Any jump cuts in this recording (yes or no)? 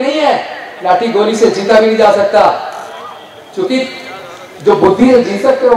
no